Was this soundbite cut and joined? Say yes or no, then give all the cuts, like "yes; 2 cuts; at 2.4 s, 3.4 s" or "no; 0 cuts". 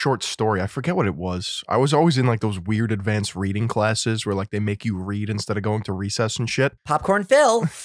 yes; 1 cut; at 6.8 s